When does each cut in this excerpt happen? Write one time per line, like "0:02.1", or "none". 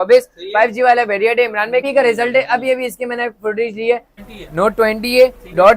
0:01.9
0:04.2